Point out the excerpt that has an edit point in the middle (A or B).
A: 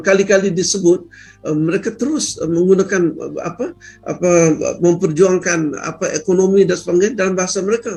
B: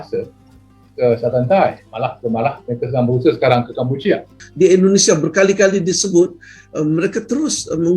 B